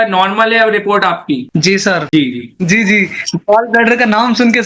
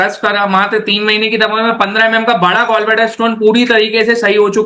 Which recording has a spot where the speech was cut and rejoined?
first; 1 cut; at 2.1 s

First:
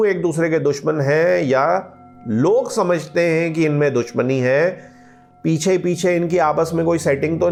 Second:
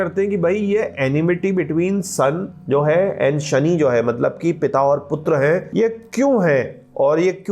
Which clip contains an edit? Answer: second; 2 cuts; at 2.5 s, 5.7 s

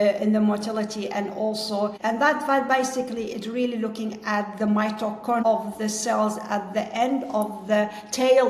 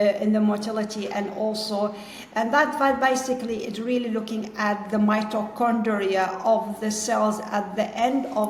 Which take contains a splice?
first; 2 cuts; at 2.0 s, 5.4 s

